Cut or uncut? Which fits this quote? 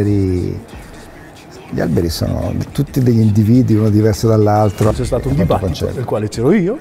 cut